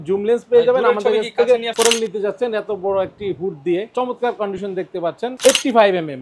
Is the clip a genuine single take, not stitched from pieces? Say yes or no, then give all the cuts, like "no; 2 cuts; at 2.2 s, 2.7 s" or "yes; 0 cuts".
no; 3 cuts; at 1.7 s, 3.9 s, 5.4 s